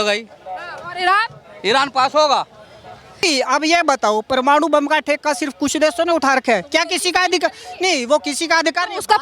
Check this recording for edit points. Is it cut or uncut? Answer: cut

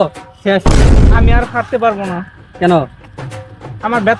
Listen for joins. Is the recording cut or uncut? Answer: uncut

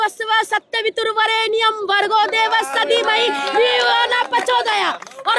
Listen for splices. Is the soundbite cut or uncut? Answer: uncut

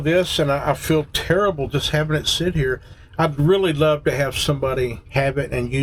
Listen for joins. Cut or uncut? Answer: uncut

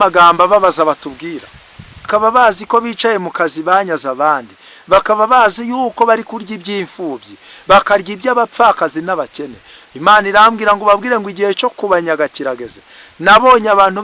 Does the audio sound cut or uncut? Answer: cut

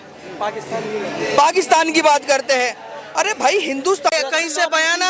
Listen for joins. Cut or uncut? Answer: cut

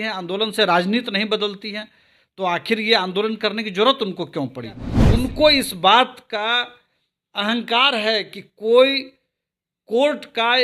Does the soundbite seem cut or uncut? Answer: cut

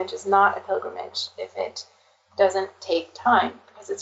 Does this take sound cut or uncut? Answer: uncut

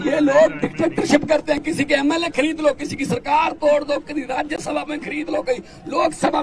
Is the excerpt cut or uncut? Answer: uncut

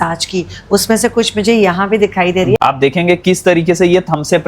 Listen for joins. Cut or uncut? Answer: cut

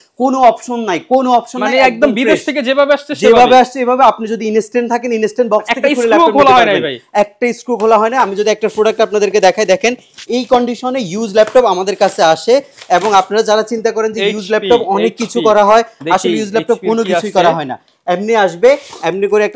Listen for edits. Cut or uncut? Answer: uncut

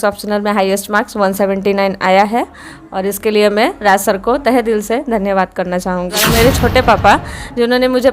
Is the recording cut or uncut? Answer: cut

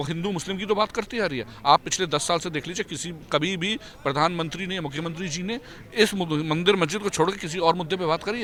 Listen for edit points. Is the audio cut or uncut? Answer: uncut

